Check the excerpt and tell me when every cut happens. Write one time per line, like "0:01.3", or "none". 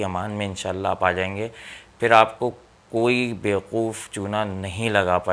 none